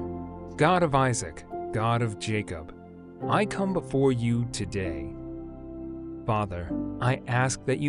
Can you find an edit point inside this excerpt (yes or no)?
no